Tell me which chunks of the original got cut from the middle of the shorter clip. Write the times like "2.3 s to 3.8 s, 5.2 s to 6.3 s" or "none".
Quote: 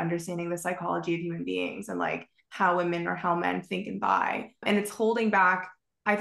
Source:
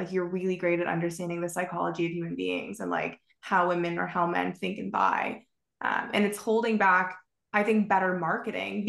5.5 s to 6.1 s

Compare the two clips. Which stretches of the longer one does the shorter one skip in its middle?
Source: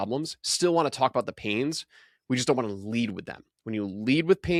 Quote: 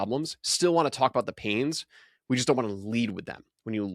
none

